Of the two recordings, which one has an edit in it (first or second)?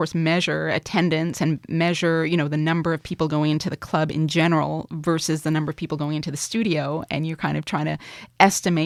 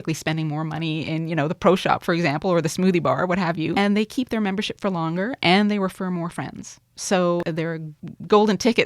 second